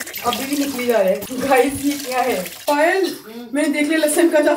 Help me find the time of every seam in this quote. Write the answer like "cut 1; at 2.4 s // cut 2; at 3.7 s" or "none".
cut 1; at 1.3 s